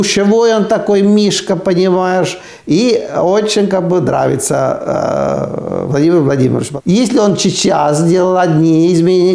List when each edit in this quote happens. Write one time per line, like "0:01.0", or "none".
0:06.7